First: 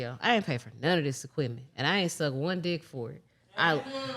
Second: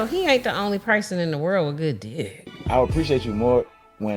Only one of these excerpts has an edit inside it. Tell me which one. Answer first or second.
second